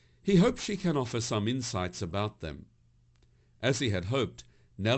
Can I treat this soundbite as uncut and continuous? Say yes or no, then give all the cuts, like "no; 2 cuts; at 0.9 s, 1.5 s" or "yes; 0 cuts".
yes; 0 cuts